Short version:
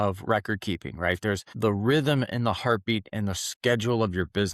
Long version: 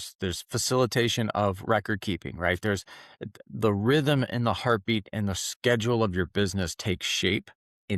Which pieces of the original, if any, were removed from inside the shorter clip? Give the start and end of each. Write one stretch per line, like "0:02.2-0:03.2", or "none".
0:02.9-0:03.5